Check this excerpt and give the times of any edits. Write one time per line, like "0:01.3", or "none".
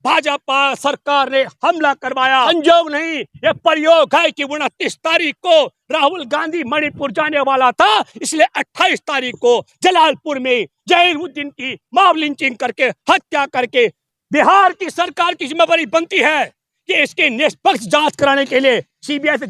0:02.5
0:14.0